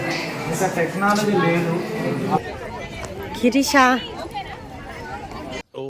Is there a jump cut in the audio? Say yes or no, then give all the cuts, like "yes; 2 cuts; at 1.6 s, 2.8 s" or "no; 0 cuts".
yes; 1 cut; at 2.4 s